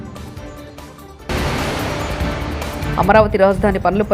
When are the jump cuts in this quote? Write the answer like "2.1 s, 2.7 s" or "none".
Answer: 1.2 s, 2.8 s

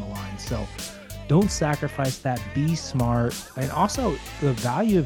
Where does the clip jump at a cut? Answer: 3.5 s

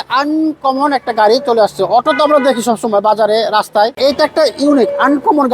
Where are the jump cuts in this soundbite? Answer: 3.9 s

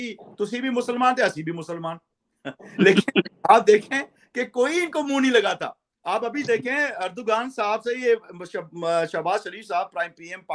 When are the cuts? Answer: none

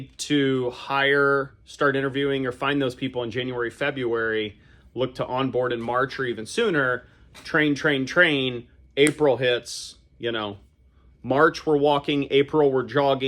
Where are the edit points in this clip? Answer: none

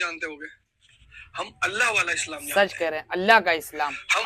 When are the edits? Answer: none

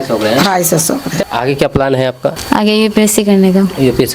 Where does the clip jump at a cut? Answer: 1.1 s, 2.4 s

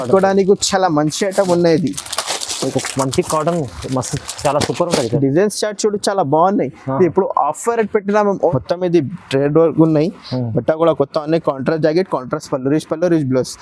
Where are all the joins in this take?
8.5 s

